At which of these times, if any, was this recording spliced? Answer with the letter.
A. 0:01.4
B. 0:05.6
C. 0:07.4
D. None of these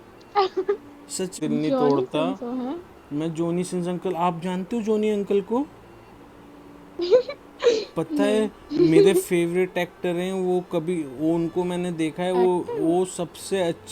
A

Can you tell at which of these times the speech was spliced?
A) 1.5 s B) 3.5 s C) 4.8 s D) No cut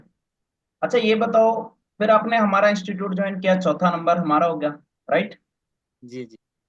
D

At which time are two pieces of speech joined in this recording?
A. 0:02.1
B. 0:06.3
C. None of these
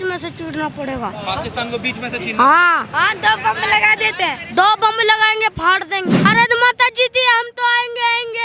B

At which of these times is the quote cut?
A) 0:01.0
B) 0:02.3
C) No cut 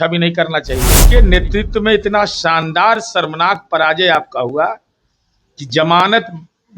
A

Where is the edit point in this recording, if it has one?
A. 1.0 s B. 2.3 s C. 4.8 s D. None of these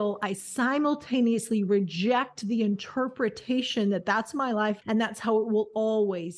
C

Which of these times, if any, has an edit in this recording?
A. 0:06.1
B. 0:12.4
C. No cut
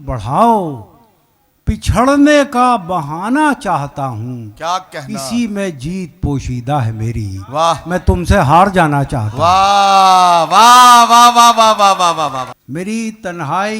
B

